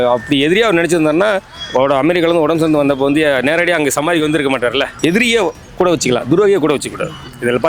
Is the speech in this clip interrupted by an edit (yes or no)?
yes